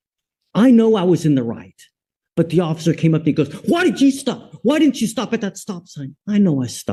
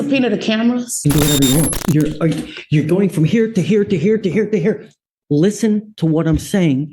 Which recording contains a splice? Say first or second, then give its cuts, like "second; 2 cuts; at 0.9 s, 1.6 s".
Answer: second; 1 cut; at 0.9 s